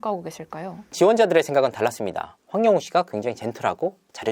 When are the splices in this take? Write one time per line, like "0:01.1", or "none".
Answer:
0:00.9